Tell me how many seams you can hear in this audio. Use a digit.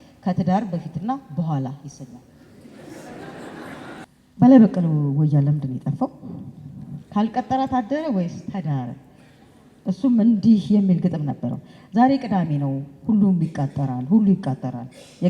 1